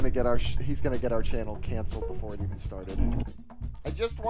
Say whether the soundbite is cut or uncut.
cut